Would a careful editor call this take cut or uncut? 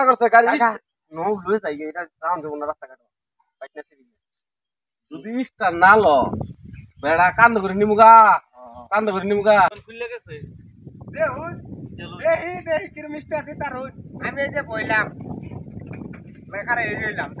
cut